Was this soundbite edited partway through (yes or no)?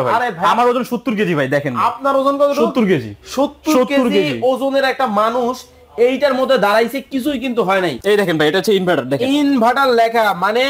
yes